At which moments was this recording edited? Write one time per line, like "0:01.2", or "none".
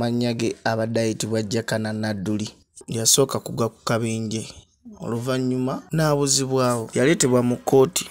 0:06.9